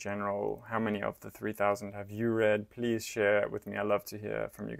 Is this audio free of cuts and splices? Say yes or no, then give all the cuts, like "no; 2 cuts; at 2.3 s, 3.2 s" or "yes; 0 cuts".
yes; 0 cuts